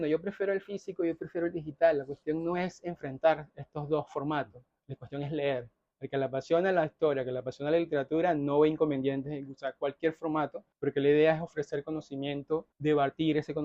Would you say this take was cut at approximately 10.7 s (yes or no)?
yes